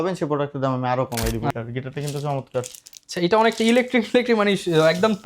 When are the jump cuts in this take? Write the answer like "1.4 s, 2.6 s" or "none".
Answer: 1.5 s